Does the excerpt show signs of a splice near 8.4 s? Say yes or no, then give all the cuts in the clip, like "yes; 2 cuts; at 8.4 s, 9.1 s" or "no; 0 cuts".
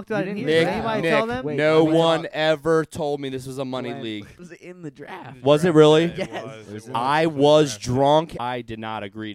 yes; 2 cuts; at 4.4 s, 8.4 s